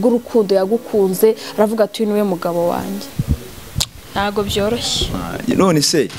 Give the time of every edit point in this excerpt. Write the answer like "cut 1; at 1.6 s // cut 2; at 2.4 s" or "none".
cut 1; at 3.1 s